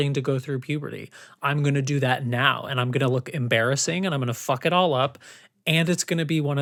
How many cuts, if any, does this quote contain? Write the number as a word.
zero